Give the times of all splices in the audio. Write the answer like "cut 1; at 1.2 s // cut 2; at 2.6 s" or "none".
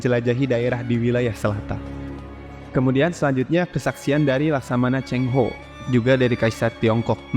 cut 1; at 2.1 s